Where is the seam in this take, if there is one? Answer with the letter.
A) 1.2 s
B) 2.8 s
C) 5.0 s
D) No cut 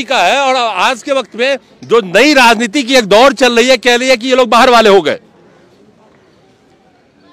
D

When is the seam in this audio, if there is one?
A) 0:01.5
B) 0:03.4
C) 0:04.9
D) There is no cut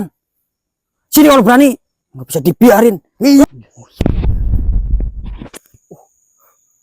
B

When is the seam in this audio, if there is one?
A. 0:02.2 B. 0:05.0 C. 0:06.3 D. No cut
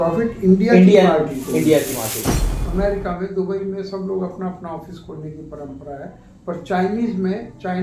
A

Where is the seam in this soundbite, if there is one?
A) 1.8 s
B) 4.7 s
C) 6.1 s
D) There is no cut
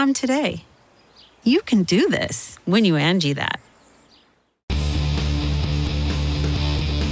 B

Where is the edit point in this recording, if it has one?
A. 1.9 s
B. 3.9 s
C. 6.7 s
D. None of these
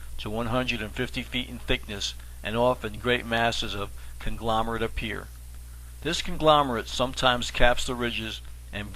C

